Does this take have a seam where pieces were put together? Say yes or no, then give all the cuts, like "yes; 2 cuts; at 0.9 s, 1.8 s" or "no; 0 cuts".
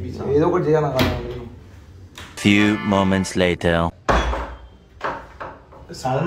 yes; 1 cut; at 2.4 s